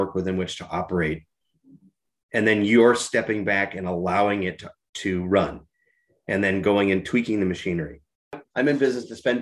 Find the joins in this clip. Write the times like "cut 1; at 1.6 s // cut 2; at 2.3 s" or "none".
cut 1; at 8.4 s

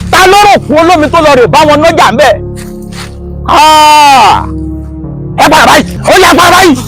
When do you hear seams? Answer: cut 1; at 5.9 s

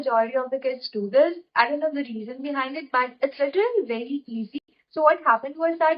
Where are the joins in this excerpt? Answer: cut 1; at 4.5 s

